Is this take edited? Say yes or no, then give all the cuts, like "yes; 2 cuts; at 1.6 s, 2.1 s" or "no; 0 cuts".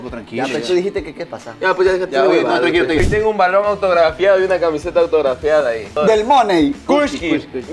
yes; 3 cuts; at 3.0 s, 6.0 s, 6.8 s